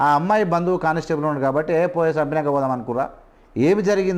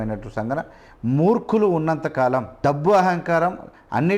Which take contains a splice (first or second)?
second